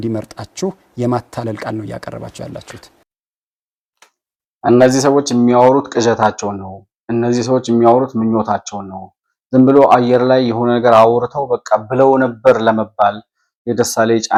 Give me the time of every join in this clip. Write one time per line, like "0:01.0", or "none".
none

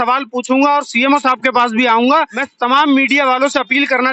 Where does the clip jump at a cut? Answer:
0:02.4

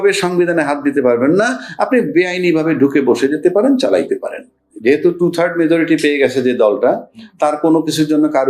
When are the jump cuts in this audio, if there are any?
0:04.7

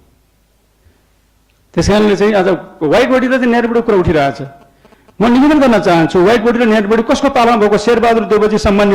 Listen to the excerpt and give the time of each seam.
none

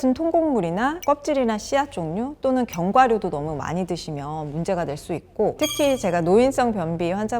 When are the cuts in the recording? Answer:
0:05.5

